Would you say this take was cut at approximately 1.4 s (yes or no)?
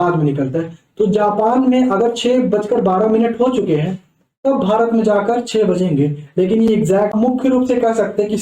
no